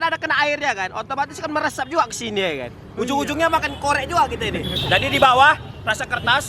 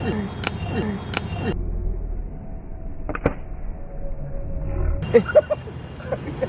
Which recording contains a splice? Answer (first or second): first